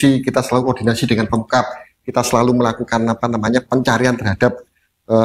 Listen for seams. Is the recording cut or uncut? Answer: uncut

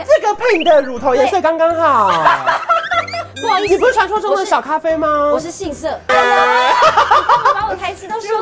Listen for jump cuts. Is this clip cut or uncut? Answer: cut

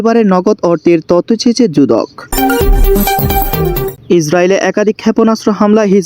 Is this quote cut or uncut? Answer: cut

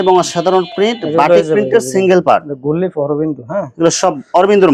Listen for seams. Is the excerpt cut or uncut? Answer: uncut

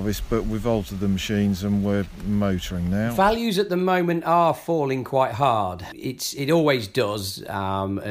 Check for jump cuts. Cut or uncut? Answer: cut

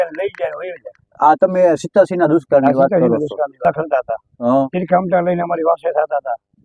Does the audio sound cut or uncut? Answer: cut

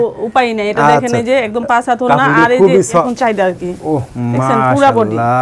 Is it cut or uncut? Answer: cut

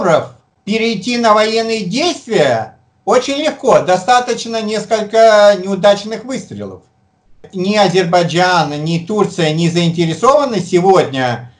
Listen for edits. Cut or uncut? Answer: cut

